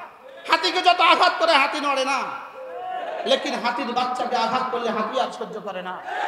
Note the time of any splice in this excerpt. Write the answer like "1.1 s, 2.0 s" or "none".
none